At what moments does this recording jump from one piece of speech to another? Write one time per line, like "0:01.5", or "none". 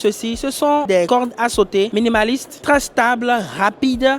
0:01.0
0:02.6